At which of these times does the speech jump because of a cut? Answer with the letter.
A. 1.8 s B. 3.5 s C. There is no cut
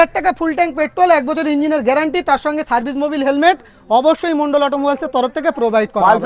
C